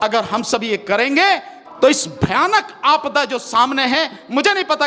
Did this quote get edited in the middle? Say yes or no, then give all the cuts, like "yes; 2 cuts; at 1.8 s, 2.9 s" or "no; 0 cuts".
yes; 1 cut; at 1.6 s